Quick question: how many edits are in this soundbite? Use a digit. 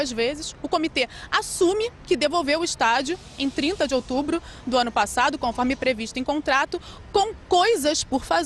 1